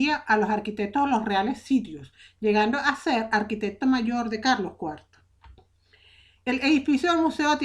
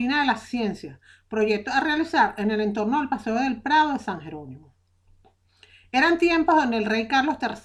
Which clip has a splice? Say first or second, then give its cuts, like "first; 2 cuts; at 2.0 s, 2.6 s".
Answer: first; 1 cut; at 4.3 s